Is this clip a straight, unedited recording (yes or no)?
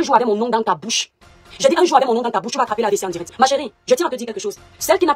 no